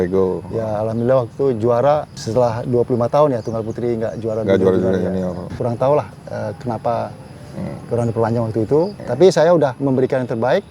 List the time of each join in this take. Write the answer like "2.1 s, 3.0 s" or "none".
5.5 s, 9.0 s